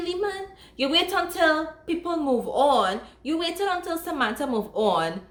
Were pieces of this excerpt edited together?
no; 0 cuts

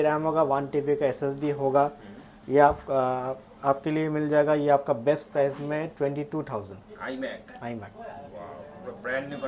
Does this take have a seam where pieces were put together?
no; 0 cuts

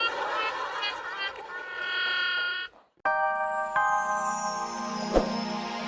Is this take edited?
yes; 1 cut; at 3.1 s

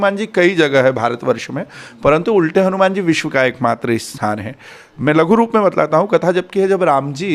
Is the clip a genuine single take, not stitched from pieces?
yes; 0 cuts

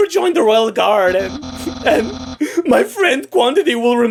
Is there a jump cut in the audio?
no; 0 cuts

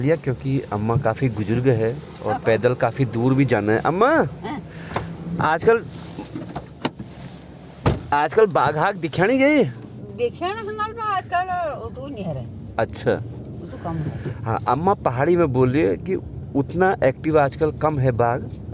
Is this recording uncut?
yes; 0 cuts

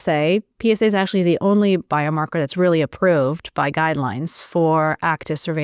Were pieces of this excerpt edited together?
no; 0 cuts

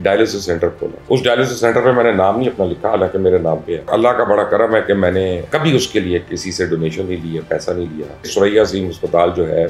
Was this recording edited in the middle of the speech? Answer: yes; 4 cuts; at 1.0 s, 3.9 s, 5.4 s, 8.3 s

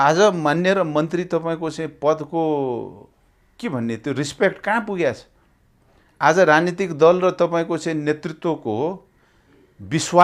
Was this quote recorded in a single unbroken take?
yes; 0 cuts

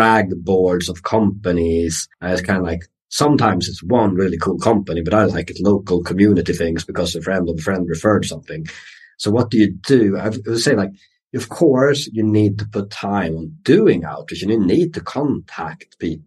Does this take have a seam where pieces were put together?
no; 0 cuts

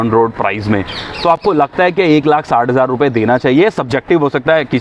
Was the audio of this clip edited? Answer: no; 0 cuts

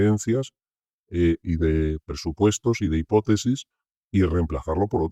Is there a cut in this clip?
no; 0 cuts

